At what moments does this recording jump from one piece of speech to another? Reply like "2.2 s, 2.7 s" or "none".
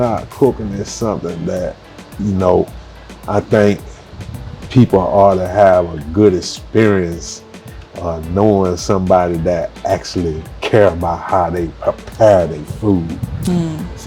2.7 s